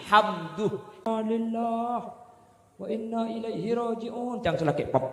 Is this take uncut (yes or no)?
no